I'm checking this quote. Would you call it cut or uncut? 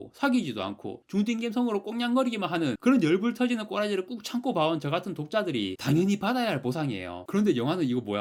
uncut